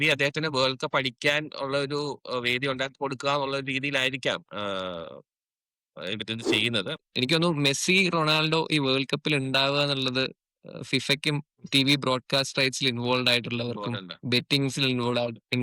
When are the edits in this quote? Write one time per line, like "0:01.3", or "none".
0:07.0